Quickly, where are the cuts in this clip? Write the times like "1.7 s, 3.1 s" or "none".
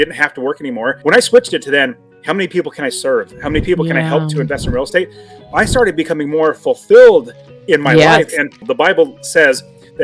1.0 s, 8.6 s

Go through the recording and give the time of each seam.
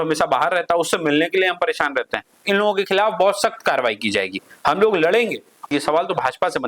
2.4 s, 5.7 s

